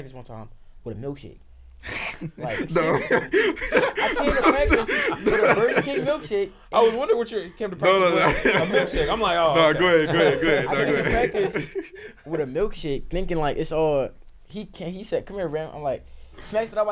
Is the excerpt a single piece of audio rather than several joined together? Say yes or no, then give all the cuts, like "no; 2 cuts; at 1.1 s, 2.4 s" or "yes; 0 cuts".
yes; 0 cuts